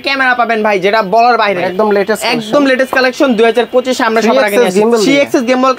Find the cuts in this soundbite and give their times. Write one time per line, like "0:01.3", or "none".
0:01.6